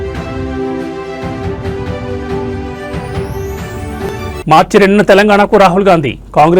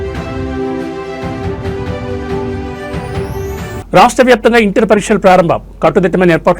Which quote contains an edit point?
second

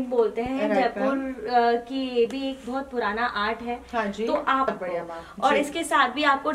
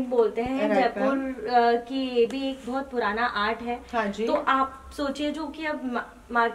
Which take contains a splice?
first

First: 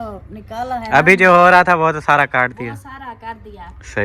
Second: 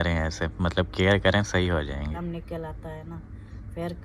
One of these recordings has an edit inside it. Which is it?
second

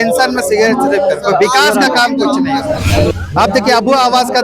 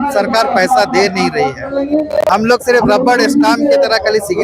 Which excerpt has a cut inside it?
first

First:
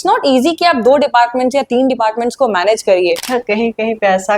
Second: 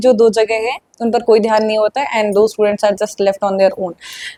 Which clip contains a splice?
first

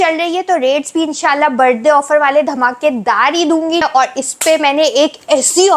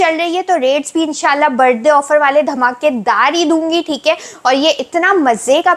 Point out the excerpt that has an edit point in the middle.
first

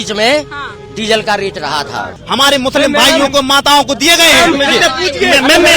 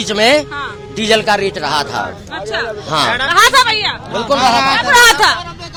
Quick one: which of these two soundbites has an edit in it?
first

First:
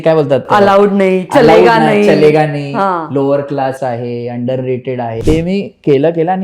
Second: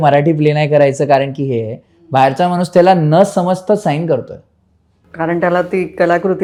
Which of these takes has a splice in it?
first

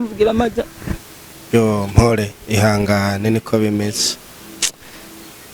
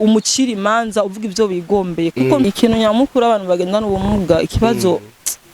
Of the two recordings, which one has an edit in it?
second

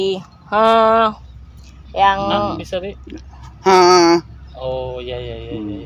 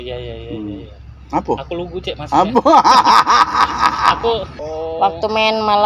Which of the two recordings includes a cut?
second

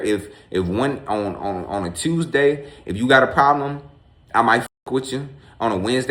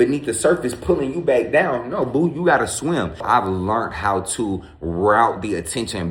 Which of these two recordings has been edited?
second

